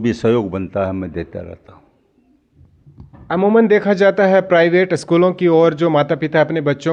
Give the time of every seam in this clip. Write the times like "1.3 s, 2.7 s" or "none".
none